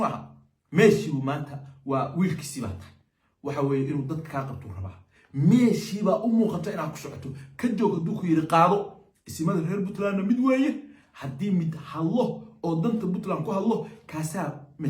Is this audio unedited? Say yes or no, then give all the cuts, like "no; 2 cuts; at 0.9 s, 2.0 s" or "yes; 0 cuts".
yes; 0 cuts